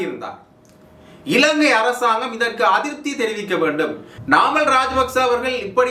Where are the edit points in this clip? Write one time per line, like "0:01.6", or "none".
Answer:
0:04.1